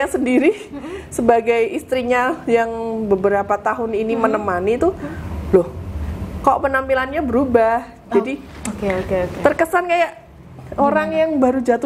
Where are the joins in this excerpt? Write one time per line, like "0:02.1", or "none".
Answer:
none